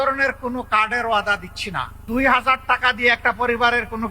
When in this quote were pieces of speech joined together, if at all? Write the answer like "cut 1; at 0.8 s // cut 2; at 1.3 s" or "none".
cut 1; at 1.9 s